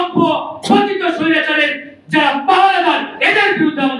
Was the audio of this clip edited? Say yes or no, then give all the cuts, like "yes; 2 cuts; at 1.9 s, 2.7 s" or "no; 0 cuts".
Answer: no; 0 cuts